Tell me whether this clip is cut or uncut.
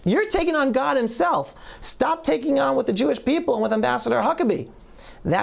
uncut